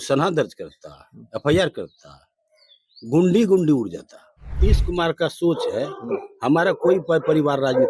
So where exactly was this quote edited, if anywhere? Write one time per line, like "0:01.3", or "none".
0:04.5